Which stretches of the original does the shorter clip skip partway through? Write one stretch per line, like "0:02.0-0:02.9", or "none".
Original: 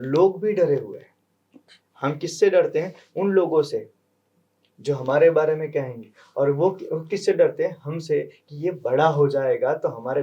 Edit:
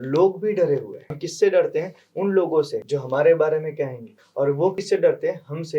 0:01.2-0:02.2
0:03.8-0:04.7
0:06.3-0:06.7